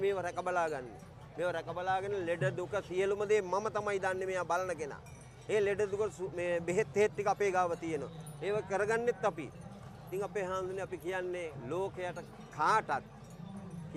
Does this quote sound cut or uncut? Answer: uncut